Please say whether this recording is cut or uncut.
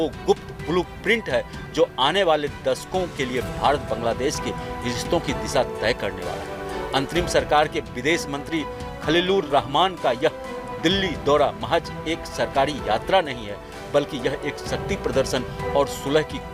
uncut